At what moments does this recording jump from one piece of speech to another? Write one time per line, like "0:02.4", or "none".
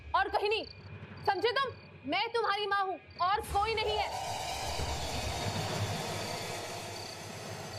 0:01.9